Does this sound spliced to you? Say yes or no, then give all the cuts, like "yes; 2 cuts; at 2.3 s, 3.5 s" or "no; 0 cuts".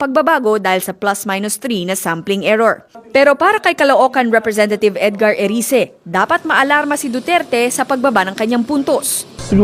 yes; 1 cut; at 5.4 s